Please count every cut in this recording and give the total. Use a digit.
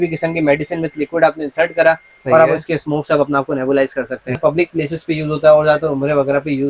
1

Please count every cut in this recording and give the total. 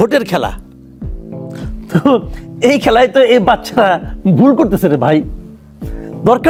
0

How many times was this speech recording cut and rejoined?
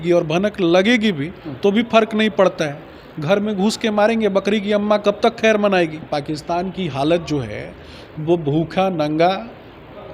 0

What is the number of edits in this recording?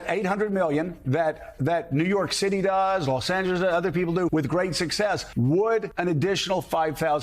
3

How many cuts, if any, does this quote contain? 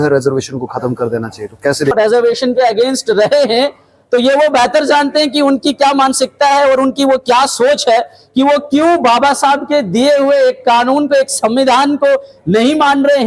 1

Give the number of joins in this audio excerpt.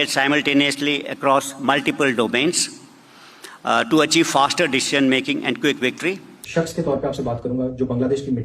1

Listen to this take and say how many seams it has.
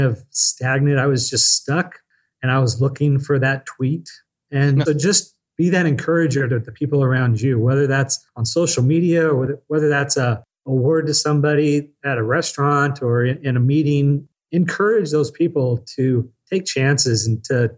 2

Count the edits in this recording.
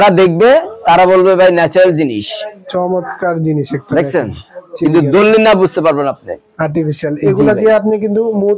0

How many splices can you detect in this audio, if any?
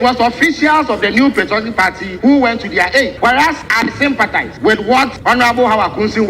4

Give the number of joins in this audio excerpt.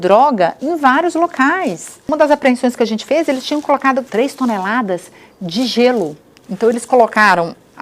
2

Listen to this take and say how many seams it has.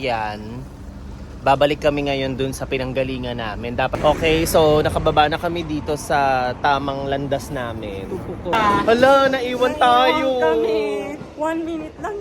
2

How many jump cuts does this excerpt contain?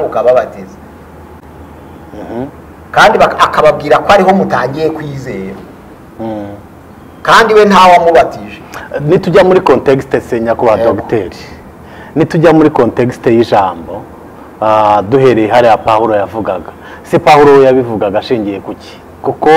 0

